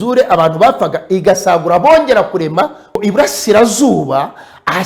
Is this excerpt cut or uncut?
cut